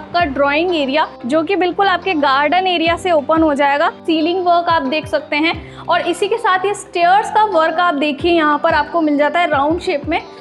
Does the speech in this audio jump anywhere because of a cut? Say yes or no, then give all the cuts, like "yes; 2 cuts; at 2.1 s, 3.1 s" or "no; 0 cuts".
yes; 2 cuts; at 1.2 s, 4.0 s